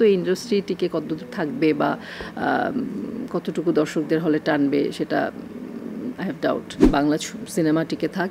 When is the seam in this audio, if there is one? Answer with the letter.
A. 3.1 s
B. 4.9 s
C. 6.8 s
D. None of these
C